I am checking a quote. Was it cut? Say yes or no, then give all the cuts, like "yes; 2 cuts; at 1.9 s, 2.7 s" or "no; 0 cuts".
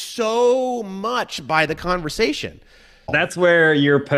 yes; 1 cut; at 3.1 s